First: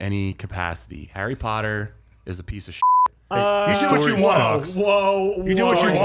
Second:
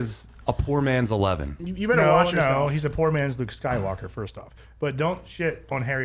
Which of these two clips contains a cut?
second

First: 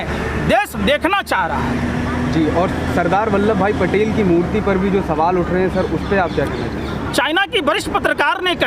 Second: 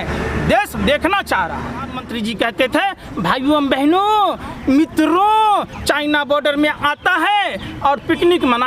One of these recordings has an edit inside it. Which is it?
second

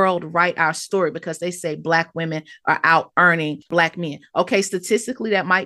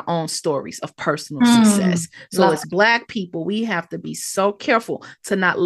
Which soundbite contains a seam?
first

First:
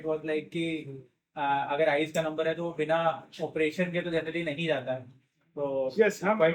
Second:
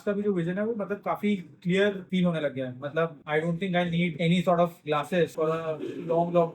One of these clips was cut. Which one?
second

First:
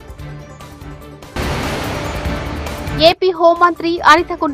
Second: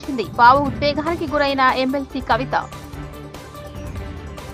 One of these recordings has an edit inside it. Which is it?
first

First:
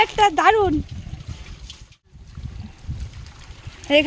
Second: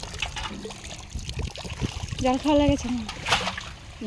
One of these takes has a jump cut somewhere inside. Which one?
first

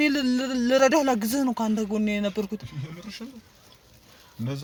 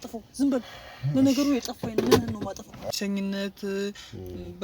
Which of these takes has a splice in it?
second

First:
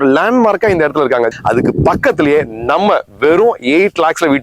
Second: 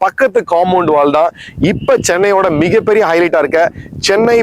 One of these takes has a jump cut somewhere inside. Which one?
first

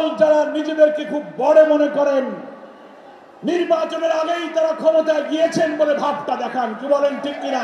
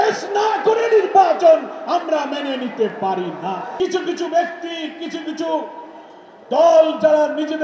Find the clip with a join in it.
second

